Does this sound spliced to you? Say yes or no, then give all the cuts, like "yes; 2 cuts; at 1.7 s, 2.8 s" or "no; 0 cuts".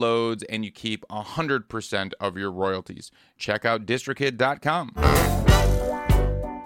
no; 0 cuts